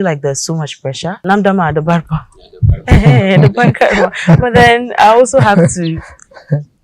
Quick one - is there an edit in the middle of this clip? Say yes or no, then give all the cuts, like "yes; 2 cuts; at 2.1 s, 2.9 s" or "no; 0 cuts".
yes; 1 cut; at 1.2 s